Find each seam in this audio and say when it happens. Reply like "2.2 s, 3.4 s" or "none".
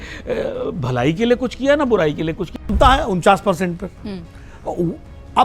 2.6 s